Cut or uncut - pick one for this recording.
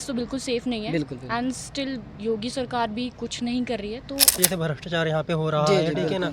cut